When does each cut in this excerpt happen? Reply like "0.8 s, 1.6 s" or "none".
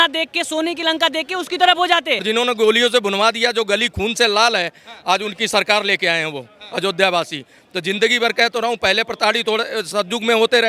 2.2 s